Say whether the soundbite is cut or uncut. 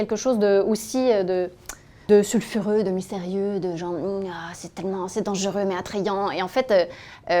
cut